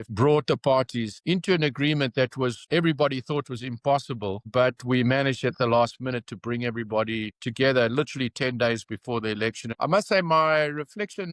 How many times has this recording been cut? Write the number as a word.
zero